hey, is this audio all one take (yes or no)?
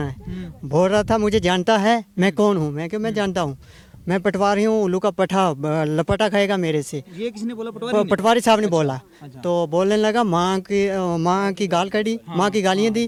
yes